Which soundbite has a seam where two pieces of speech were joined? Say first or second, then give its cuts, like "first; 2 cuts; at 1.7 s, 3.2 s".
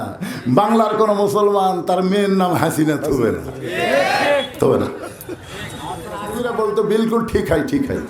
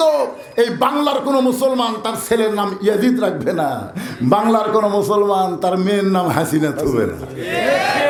first; 1 cut; at 6.3 s